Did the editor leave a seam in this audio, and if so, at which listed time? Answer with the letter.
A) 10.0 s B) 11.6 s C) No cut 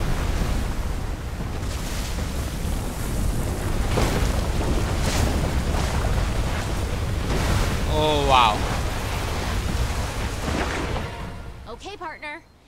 B